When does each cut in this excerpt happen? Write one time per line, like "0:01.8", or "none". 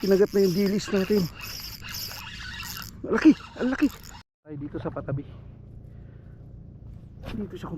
0:04.2